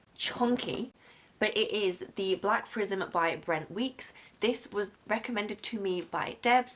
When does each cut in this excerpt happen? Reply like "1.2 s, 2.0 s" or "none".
none